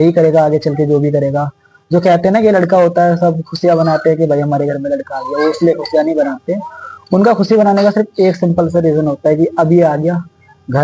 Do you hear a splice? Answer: no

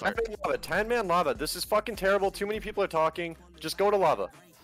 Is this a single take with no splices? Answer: yes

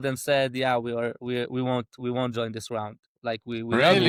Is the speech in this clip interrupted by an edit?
no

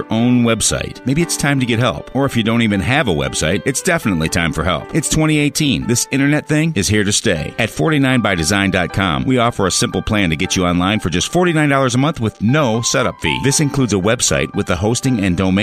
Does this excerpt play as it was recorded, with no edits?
yes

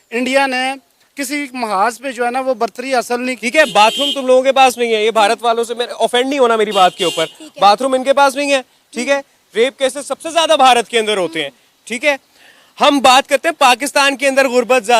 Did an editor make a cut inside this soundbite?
yes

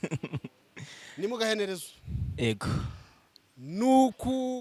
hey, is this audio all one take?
yes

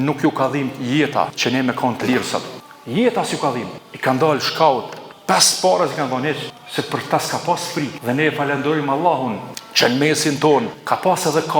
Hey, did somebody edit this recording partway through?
yes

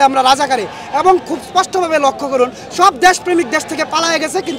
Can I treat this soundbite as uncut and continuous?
yes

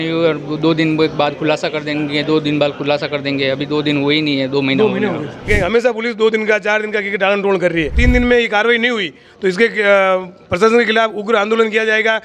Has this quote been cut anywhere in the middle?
yes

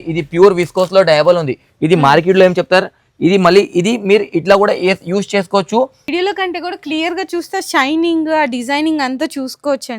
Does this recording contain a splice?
yes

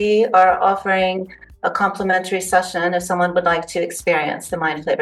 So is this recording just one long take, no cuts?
yes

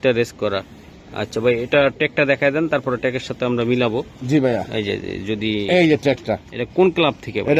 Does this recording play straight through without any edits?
yes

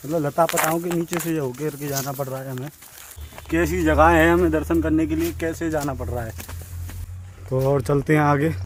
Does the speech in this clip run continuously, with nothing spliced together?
yes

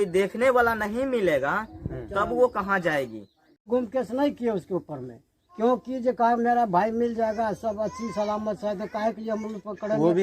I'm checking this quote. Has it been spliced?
yes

